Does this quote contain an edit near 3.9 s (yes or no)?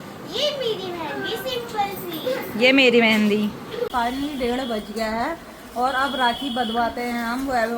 yes